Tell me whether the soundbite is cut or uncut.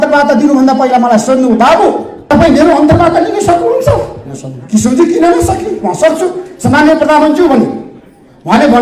uncut